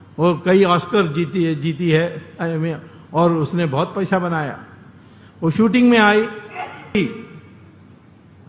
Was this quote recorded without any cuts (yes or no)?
no